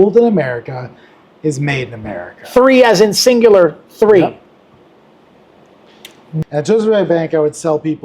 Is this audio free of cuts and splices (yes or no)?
no